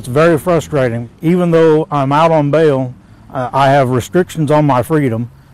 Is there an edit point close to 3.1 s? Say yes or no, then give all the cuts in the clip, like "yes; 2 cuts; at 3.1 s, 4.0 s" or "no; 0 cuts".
no; 0 cuts